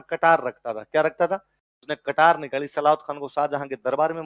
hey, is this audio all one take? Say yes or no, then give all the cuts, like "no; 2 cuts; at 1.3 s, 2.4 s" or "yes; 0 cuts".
yes; 0 cuts